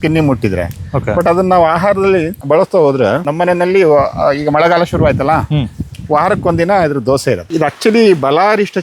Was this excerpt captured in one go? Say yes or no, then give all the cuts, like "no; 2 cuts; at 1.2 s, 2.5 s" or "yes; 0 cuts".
no; 3 cuts; at 2.4 s, 3.2 s, 7.4 s